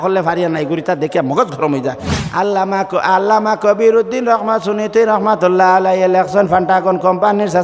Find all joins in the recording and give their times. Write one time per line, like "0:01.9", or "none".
0:02.1